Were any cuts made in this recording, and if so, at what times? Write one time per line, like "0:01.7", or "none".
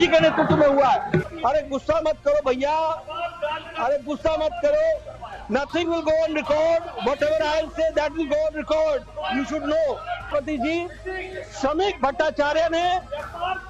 0:01.3
0:10.3